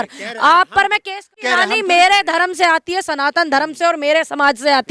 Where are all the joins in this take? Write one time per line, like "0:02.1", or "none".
0:01.4